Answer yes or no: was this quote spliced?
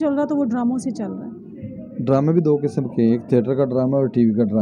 no